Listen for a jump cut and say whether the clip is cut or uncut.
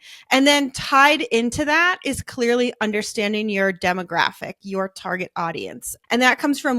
cut